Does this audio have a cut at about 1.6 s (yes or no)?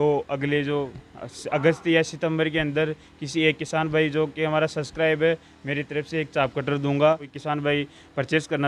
no